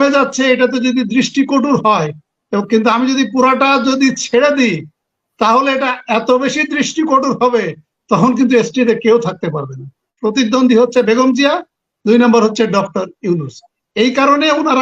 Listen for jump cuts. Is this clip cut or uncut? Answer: cut